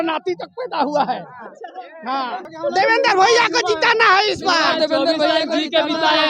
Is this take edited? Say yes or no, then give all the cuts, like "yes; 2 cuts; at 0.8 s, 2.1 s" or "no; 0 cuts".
yes; 1 cut; at 2.3 s